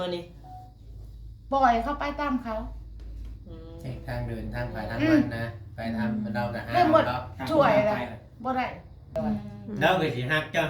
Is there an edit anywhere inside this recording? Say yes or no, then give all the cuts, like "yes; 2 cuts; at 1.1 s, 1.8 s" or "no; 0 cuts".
yes; 1 cut; at 9.1 s